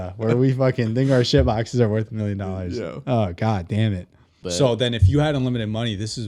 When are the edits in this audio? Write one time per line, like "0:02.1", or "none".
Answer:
0:04.4

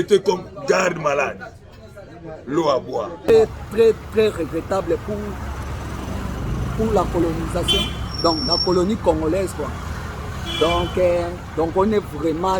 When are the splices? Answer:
0:03.2

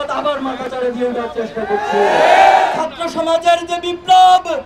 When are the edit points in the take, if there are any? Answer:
0:02.7

